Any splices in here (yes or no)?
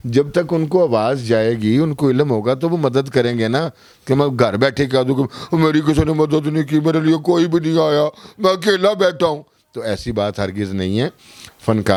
no